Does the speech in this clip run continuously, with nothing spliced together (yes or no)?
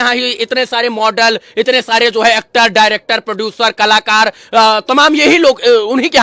yes